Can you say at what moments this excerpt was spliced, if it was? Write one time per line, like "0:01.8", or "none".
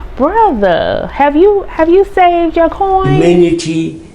0:03.1